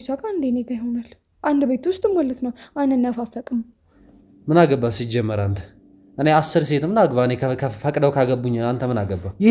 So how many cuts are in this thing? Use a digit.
1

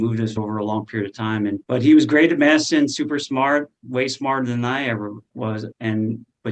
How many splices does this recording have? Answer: 0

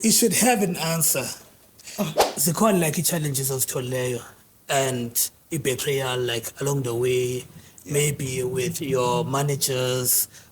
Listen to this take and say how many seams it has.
1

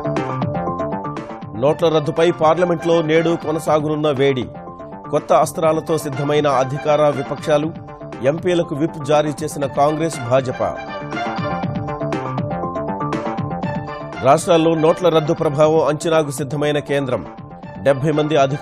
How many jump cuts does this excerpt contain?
1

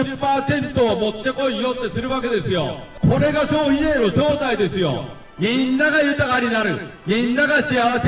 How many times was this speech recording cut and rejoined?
2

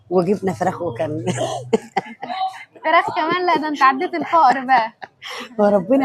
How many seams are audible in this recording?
0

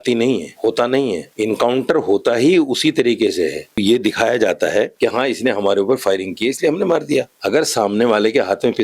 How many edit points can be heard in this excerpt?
1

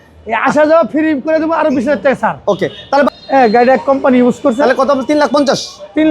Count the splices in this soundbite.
1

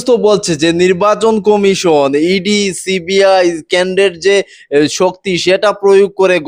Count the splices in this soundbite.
0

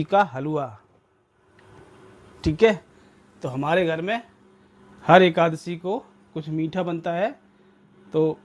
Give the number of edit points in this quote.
0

